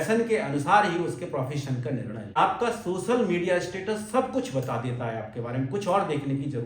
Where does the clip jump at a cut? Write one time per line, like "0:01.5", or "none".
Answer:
0:02.4